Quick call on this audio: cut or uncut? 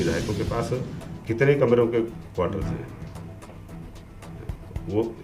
uncut